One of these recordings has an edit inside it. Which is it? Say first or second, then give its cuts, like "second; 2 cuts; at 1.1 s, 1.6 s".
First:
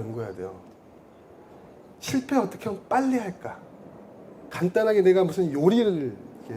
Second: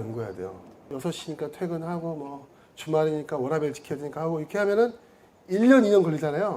second; 1 cut; at 0.9 s